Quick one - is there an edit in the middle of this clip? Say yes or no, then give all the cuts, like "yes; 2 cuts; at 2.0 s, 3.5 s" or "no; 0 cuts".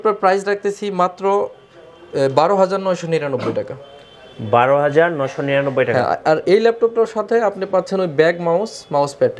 no; 0 cuts